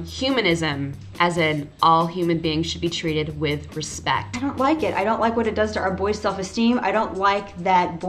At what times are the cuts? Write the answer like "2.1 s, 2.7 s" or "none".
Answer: 4.3 s